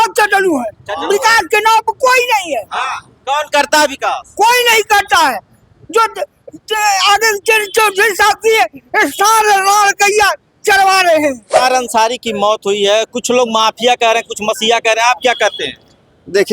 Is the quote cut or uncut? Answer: cut